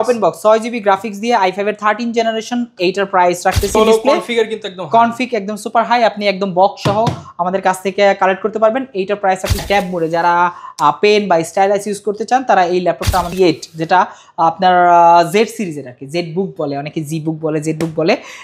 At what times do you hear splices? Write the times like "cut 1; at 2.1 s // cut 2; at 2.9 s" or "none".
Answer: cut 1; at 3.7 s // cut 2; at 9.6 s // cut 3; at 13.3 s